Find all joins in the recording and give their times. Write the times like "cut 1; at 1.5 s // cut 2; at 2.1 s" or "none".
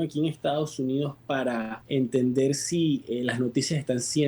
cut 1; at 1.8 s